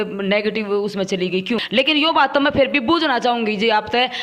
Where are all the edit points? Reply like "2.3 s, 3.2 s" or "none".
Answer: 1.6 s